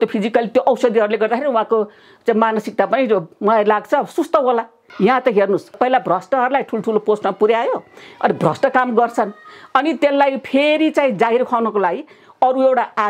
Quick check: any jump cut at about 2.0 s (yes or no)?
no